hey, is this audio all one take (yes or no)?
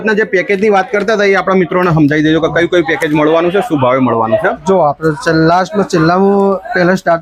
yes